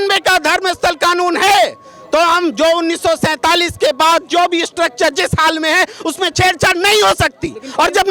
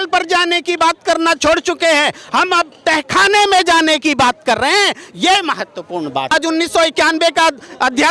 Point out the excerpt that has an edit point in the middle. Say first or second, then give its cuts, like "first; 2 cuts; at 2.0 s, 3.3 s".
second; 1 cut; at 6.3 s